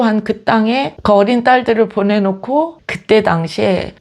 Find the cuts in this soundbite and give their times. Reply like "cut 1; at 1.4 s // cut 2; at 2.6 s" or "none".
cut 1; at 2.7 s